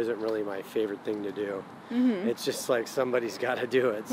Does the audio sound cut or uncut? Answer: uncut